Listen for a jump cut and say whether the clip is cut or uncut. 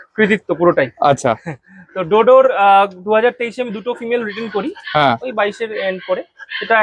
uncut